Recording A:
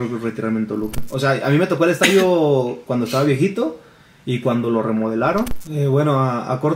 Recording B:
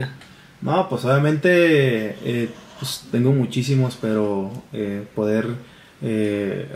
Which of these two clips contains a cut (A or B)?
A